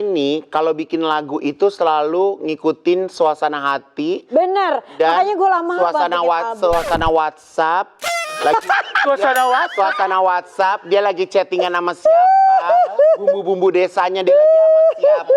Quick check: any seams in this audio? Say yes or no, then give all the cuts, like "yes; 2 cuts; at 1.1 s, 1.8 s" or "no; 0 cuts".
no; 0 cuts